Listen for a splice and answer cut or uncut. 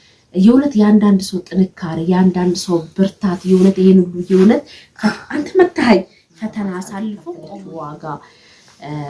cut